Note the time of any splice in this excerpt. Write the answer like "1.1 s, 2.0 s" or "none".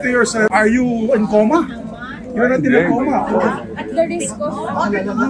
none

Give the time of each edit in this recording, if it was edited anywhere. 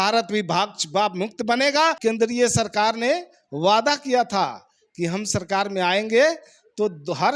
2.0 s

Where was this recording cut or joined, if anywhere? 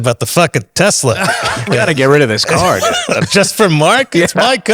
none

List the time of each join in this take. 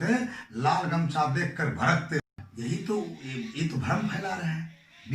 2.3 s

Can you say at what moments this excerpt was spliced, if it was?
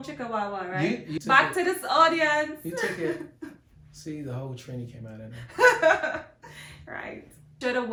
none

